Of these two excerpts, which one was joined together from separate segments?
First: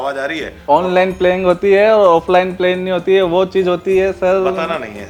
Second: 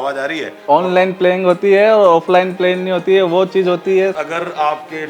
second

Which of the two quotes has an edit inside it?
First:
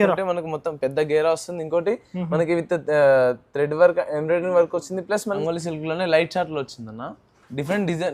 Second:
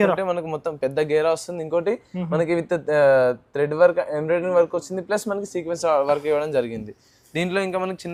first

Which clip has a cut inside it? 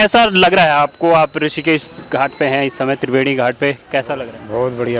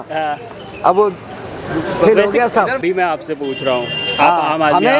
second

